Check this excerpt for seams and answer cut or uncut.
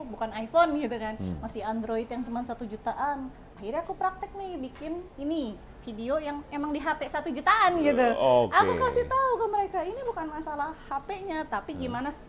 uncut